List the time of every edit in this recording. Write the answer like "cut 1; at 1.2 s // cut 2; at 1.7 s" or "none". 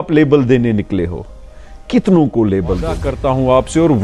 cut 1; at 3.1 s